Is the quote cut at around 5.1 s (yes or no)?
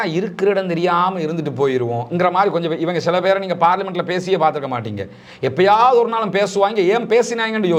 no